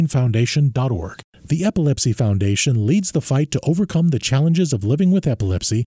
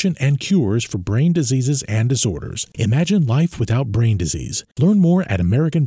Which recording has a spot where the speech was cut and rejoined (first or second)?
first